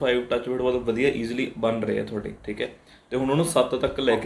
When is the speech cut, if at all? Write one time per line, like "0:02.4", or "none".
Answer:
none